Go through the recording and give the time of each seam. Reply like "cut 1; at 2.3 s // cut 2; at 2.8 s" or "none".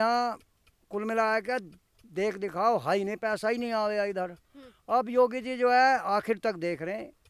none